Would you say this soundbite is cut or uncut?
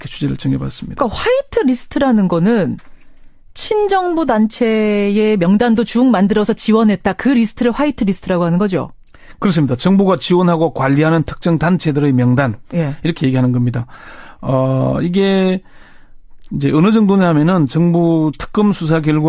cut